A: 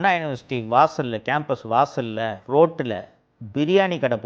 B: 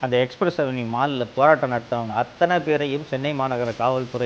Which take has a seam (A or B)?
A